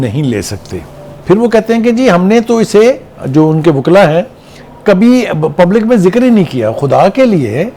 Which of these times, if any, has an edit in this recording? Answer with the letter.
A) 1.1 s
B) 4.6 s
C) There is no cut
A